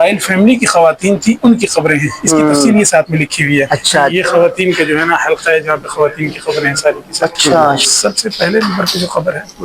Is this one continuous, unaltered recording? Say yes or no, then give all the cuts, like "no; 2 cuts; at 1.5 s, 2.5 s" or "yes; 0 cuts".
no; 2 cuts; at 4.1 s, 7.8 s